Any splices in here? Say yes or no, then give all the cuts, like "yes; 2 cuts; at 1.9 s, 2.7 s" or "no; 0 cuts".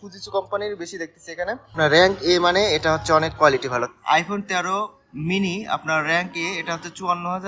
yes; 2 cuts; at 1.7 s, 3.8 s